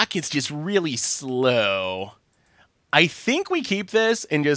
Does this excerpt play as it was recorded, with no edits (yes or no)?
yes